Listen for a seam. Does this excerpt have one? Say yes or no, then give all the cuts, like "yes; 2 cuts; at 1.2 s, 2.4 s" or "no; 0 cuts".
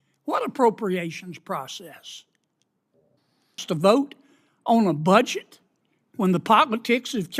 yes; 1 cut; at 3.6 s